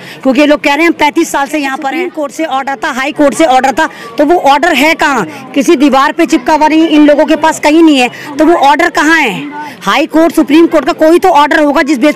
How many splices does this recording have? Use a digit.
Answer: 1